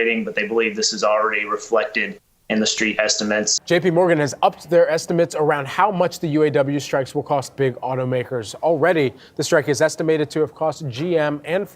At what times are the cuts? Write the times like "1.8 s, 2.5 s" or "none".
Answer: 3.5 s